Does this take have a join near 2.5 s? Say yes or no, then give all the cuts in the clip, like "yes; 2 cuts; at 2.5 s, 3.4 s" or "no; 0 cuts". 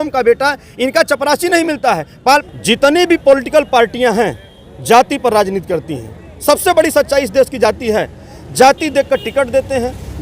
yes; 1 cut; at 2.5 s